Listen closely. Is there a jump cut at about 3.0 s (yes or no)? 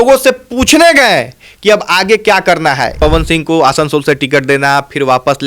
yes